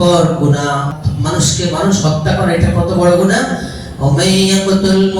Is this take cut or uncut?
cut